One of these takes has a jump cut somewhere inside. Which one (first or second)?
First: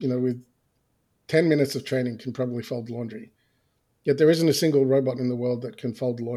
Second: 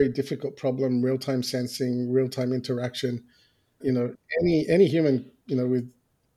second